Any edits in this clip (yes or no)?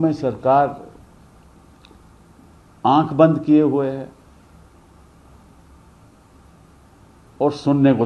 no